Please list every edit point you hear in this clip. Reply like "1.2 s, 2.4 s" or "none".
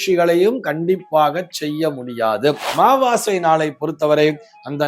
2.7 s